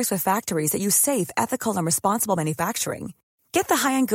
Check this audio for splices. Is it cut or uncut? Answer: uncut